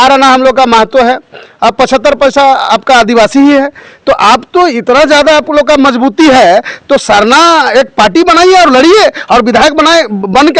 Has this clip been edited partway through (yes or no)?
no